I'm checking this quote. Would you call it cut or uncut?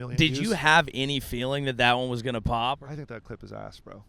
cut